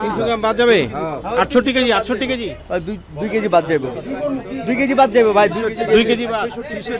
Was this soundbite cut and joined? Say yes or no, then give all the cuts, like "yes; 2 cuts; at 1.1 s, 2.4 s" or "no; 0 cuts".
no; 0 cuts